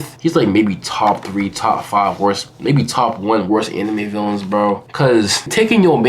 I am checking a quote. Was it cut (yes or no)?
no